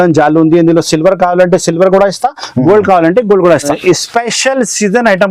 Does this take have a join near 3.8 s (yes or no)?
yes